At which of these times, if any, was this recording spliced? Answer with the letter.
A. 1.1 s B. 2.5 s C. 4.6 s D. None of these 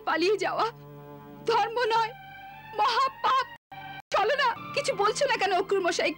C